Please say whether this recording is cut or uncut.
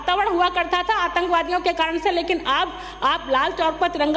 uncut